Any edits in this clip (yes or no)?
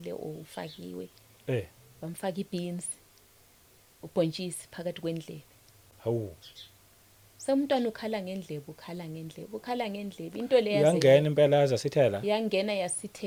no